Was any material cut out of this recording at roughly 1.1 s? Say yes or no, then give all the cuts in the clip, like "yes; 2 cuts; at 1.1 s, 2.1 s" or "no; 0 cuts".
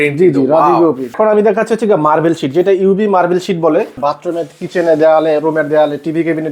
yes; 2 cuts; at 1.1 s, 4.0 s